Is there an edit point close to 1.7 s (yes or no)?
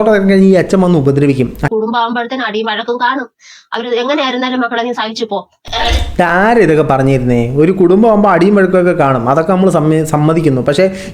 yes